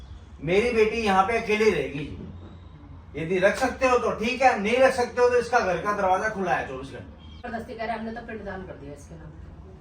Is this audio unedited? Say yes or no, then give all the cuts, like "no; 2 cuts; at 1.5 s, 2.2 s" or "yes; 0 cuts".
no; 1 cut; at 7.5 s